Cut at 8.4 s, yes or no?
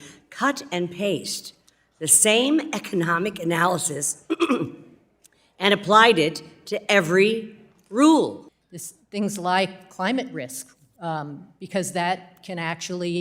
yes